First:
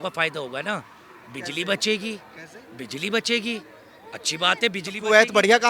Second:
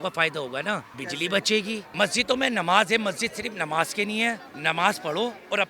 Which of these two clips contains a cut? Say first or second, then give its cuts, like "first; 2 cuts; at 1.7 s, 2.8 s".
second; 3 cuts; at 1.0 s, 1.9 s, 4.5 s